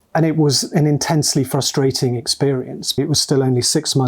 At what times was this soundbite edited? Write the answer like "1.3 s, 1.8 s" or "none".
2.9 s